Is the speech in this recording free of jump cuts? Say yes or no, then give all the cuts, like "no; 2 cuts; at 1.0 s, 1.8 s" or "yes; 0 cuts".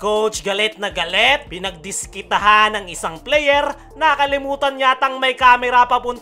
yes; 0 cuts